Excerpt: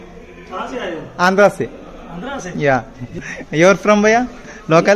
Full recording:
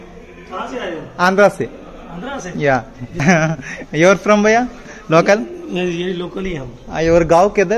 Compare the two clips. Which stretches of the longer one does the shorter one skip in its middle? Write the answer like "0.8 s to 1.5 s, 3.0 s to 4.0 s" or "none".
3.2 s to 3.6 s